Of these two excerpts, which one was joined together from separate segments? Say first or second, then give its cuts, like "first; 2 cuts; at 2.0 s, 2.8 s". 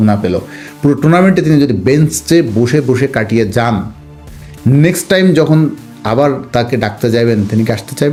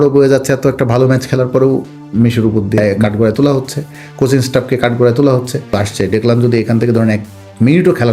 second; 2 cuts; at 2.8 s, 5.8 s